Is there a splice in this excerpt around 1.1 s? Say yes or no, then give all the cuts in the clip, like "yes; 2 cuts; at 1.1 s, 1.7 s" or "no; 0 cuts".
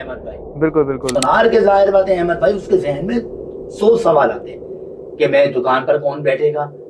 yes; 1 cut; at 1.1 s